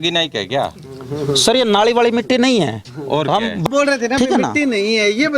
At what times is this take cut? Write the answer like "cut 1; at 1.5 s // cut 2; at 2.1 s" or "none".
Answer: cut 1; at 3.6 s